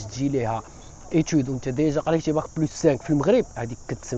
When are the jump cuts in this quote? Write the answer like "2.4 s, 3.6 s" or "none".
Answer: none